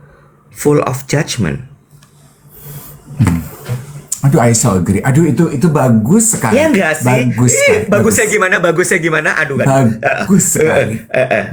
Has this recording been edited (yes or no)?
no